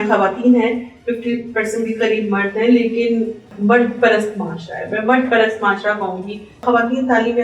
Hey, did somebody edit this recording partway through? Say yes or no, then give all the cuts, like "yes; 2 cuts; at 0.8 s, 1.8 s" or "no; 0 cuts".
yes; 2 cuts; at 3.5 s, 6.6 s